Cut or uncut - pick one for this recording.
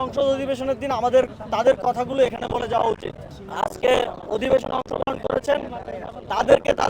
cut